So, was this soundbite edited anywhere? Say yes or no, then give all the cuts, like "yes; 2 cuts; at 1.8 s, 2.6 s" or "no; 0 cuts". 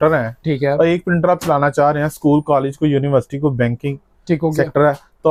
no; 0 cuts